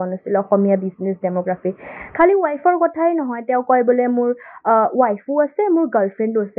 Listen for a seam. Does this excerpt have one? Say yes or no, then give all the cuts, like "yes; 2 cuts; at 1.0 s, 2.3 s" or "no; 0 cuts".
no; 0 cuts